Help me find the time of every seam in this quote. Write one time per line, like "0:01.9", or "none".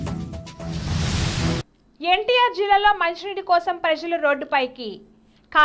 0:01.6

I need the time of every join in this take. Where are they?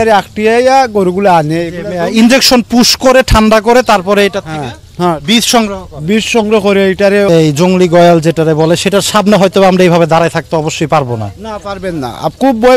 0:07.3

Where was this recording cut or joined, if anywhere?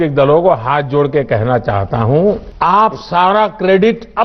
0:02.5

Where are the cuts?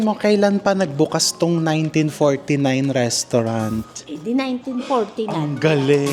none

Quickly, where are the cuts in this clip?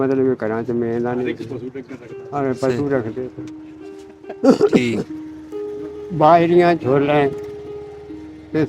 none

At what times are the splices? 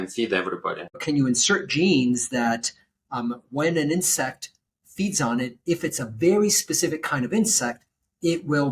0:01.0

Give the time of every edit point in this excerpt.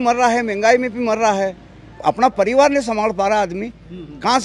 0:02.0

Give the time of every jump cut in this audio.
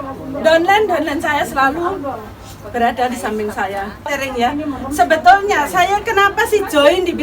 0:04.1

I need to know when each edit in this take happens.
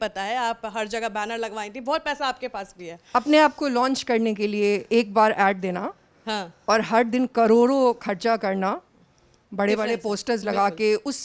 none

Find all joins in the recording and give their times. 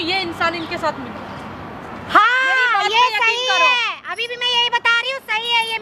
none

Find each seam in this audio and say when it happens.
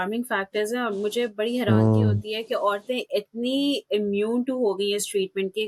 none

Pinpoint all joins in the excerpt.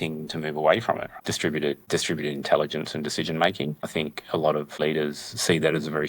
0:01.1
0:04.8

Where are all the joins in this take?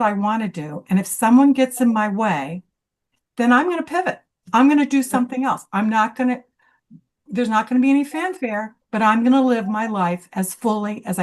none

